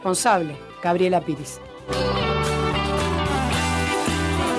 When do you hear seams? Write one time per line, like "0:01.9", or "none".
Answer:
0:03.7